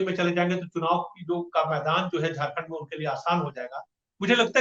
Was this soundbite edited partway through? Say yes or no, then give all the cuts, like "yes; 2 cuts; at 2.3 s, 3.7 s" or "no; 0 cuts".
no; 0 cuts